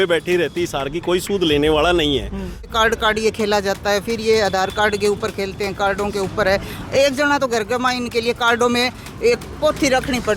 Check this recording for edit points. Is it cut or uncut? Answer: cut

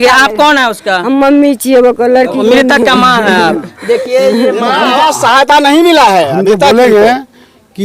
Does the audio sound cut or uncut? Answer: cut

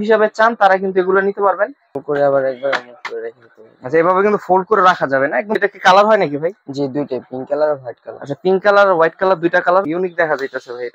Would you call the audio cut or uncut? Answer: cut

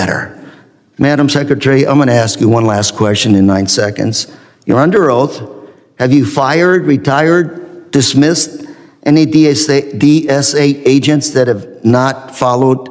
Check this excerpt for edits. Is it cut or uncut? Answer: uncut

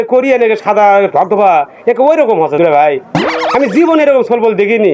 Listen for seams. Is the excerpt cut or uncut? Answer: uncut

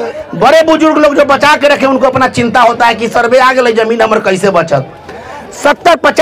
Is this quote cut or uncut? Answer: uncut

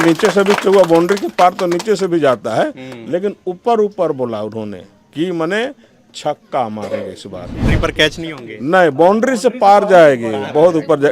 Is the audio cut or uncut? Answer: cut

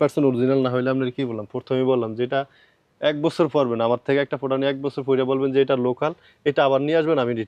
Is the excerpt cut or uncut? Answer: uncut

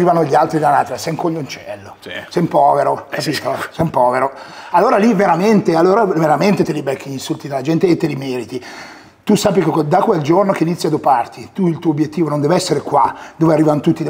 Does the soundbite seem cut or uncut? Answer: uncut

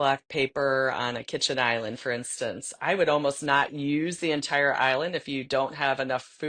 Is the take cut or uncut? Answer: uncut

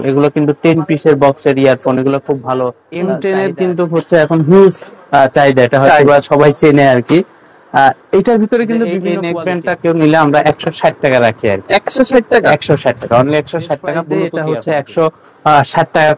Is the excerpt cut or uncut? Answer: cut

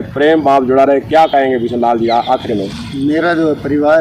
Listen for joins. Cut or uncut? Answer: uncut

